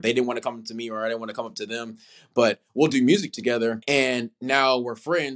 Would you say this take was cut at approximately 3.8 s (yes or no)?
yes